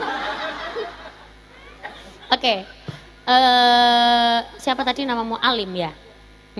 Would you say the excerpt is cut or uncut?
uncut